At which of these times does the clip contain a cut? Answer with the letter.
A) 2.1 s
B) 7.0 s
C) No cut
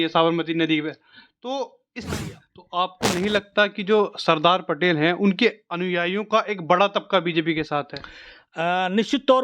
A